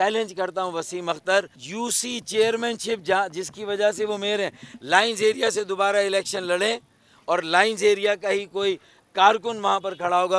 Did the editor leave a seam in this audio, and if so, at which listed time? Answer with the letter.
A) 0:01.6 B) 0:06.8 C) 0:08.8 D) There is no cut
A